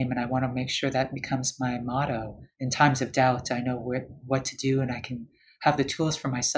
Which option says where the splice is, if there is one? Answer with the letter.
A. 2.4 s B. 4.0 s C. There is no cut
A